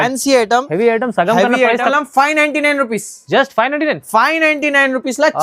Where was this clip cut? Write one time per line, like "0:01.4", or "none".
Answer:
0:01.9